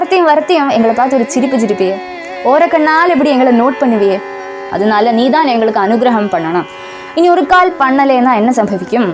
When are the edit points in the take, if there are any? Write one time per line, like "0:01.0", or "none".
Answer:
0:04.7